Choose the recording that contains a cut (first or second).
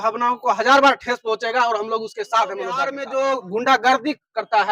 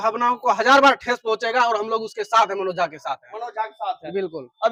first